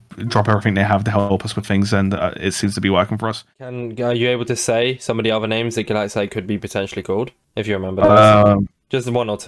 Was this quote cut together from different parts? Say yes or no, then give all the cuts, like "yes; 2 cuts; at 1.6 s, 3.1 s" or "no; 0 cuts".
yes; 1 cut; at 3.5 s